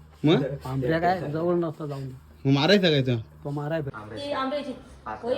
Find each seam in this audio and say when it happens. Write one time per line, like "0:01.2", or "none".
0:04.0